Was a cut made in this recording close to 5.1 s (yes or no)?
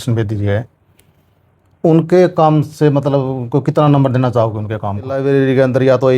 yes